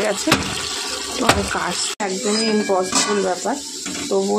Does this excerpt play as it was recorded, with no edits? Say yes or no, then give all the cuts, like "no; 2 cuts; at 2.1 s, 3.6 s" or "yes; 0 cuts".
no; 1 cut; at 2.0 s